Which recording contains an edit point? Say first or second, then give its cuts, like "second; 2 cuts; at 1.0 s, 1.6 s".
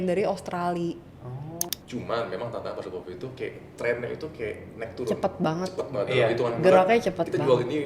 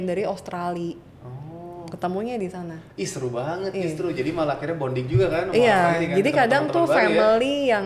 first; 1 cut; at 1.7 s